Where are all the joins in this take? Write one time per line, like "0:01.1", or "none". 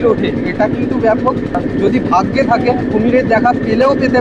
0:01.6
0:02.8